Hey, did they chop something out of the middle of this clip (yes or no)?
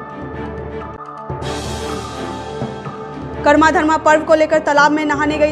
yes